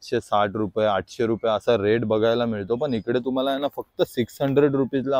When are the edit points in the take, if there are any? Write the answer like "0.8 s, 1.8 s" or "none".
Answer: none